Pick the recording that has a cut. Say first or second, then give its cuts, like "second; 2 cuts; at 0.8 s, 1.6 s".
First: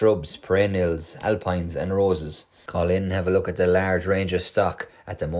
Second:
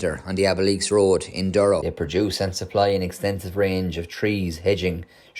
second; 1 cut; at 1.9 s